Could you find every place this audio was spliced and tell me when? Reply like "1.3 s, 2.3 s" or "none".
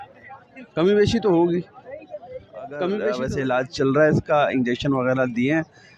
3.2 s